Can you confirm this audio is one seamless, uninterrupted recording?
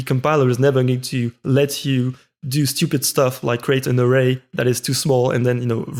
yes; 0 cuts

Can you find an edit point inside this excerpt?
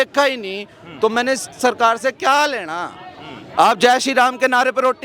no; 0 cuts

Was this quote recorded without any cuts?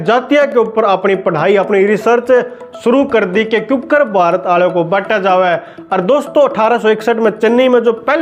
yes; 0 cuts

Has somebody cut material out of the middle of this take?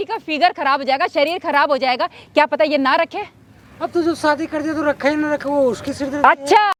no; 0 cuts

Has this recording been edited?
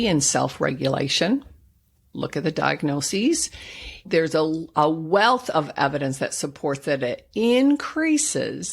yes; 1 cut; at 4.0 s

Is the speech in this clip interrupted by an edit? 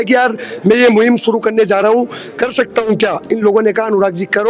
no; 0 cuts

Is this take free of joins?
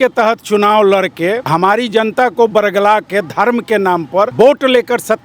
no; 2 cuts; at 1.4 s, 4.3 s

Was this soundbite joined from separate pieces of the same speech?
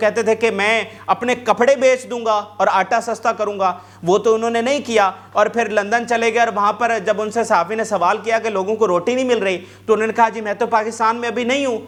no; 0 cuts

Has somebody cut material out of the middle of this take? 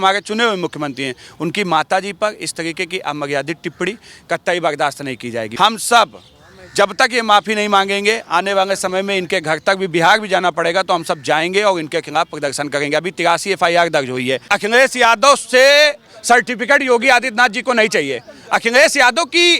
yes; 2 cuts; at 5.4 s, 14.5 s

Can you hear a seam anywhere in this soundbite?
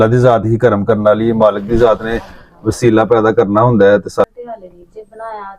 yes; 1 cut; at 4.3 s

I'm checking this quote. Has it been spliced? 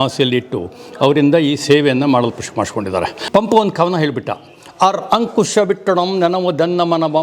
yes; 1 cut; at 3.3 s

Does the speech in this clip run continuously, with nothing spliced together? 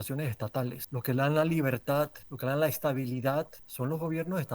no; 3 cuts; at 0.9 s, 2.3 s, 3.6 s

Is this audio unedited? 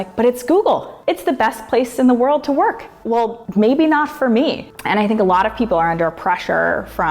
no; 2 cuts; at 2.9 s, 4.7 s

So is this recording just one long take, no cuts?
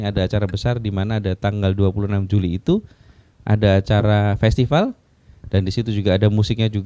yes; 0 cuts

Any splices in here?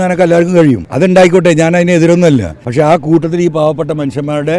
yes; 2 cuts; at 0.9 s, 2.6 s

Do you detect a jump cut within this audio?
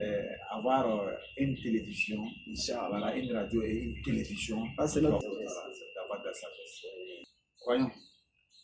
yes; 2 cuts; at 5.2 s, 7.3 s

